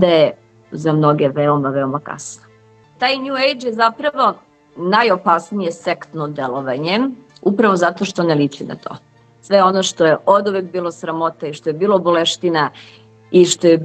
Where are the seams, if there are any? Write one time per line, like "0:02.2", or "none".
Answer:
0:02.9
0:09.4